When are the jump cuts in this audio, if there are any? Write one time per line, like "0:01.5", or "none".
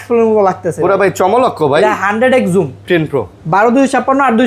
0:02.8